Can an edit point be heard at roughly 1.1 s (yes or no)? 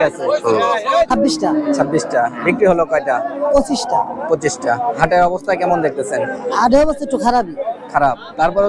yes